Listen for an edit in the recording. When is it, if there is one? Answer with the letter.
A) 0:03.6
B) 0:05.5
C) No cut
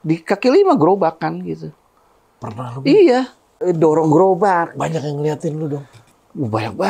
A